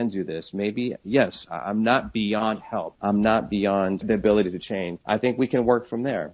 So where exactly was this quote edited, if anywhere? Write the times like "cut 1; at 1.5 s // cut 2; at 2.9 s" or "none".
cut 1; at 2.9 s // cut 2; at 4.0 s // cut 3; at 4.9 s